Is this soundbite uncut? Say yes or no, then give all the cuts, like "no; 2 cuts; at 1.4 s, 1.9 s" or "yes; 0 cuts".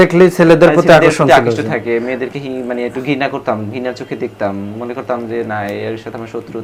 yes; 0 cuts